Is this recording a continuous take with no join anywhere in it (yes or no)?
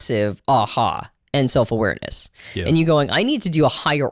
yes